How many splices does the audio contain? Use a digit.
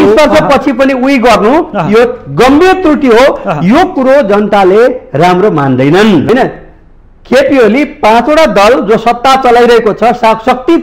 1